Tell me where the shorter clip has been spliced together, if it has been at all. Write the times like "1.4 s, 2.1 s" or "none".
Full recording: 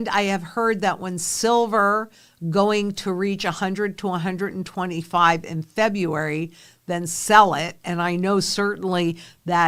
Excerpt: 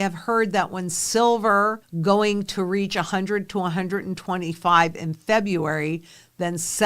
1.9 s